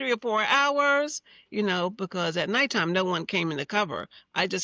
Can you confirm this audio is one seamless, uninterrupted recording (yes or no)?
yes